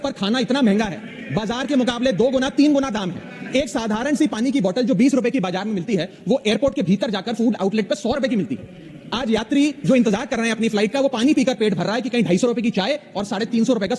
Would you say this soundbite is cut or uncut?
uncut